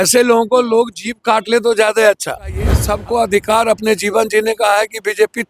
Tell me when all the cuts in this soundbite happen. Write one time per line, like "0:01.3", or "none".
0:02.8